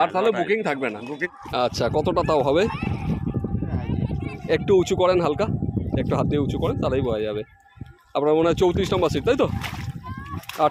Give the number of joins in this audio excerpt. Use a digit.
1